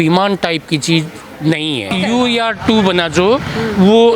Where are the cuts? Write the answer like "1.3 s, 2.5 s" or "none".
1.9 s